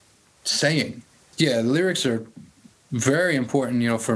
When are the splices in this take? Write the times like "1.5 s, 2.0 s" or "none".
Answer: 1.2 s